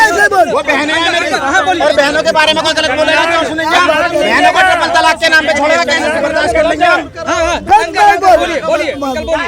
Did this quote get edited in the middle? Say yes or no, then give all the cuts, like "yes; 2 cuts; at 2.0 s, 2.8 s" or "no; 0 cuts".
no; 0 cuts